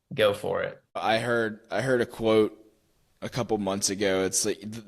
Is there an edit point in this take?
yes; 1 cut; at 1.0 s

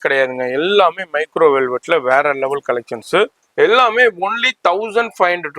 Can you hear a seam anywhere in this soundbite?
yes; 1 cut; at 3.4 s

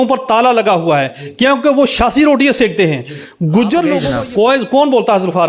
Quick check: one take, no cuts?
no; 1 cut; at 4.1 s

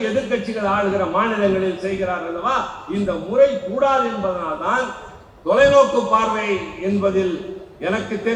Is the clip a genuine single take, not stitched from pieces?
yes; 0 cuts

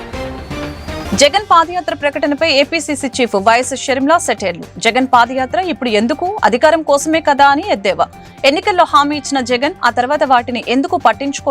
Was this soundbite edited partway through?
yes; 1 cut; at 1.0 s

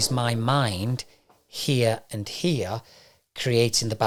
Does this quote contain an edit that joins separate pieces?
no; 0 cuts

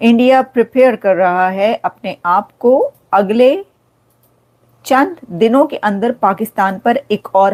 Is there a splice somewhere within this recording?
no; 0 cuts

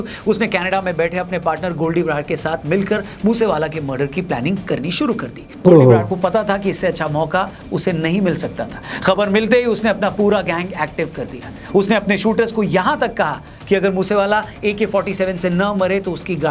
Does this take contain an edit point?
yes; 1 cut; at 5.4 s

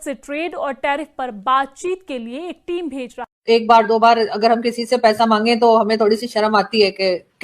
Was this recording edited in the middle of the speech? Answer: yes; 1 cut; at 3.2 s

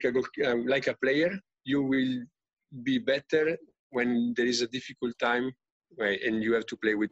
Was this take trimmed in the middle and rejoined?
no; 0 cuts

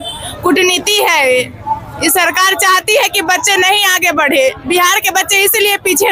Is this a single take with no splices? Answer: yes; 0 cuts

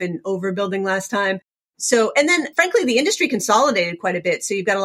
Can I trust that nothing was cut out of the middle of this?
no; 2 cuts; at 1.7 s, 2.5 s

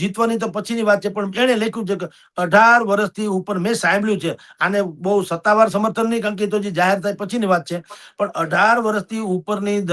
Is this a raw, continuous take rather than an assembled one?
yes; 0 cuts

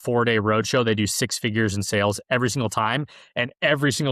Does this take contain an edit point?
no; 0 cuts

